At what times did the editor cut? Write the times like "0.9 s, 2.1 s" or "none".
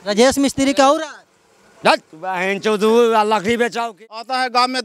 3.9 s